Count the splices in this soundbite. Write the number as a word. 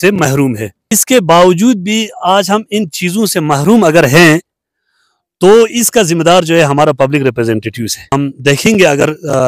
two